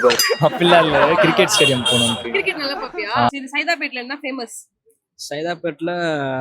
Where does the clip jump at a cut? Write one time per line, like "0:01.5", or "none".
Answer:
0:03.3